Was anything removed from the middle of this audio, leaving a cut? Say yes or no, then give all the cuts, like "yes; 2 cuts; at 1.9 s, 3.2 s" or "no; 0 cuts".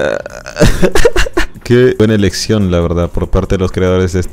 yes; 1 cut; at 1.5 s